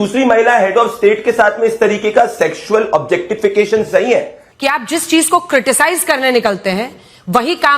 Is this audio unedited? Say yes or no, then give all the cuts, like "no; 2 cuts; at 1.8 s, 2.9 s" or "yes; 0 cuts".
no; 1 cut; at 4.4 s